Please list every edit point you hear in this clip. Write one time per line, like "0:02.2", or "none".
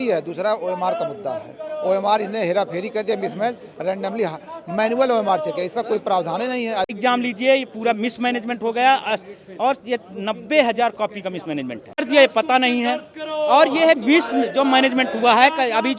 0:06.9
0:12.0